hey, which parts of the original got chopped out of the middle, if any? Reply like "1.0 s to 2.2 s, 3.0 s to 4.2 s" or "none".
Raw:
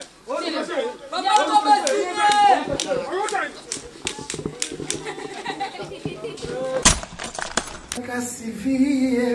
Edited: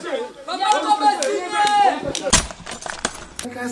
2.9 s to 6.8 s